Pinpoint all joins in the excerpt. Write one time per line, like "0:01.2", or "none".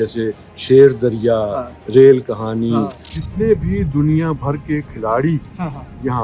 0:03.2